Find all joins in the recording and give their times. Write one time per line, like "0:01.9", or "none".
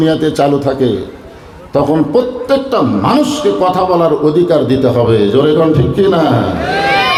none